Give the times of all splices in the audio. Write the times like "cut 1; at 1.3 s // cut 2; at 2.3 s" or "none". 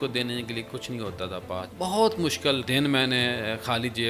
cut 1; at 1.7 s // cut 2; at 2.6 s